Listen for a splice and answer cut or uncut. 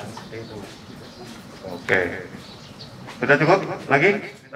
uncut